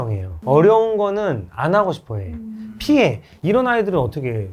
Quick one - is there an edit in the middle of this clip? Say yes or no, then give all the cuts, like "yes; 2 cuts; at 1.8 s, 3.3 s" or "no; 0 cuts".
yes; 1 cut; at 3.3 s